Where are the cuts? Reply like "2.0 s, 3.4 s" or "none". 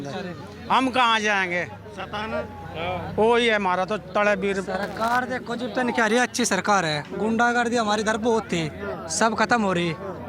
none